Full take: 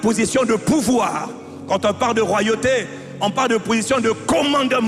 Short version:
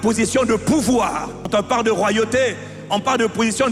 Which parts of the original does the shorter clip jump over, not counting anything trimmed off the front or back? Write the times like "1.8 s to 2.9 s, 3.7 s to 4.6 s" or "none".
1.4 s to 1.8 s

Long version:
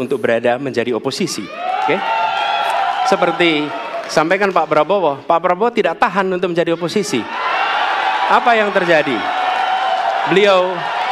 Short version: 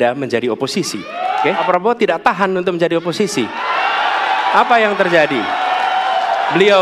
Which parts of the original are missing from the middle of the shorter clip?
2.1 s to 5.4 s

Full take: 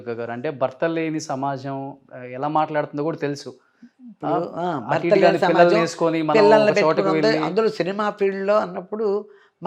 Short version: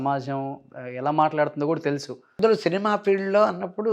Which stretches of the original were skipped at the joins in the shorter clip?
3.7 s to 7.5 s

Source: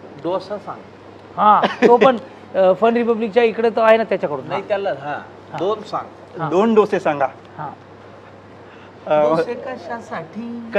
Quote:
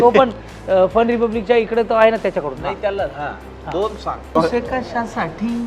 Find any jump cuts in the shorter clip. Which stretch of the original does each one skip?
6.2 s to 9.3 s

